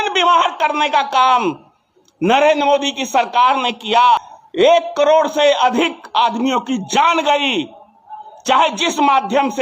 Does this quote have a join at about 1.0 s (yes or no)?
no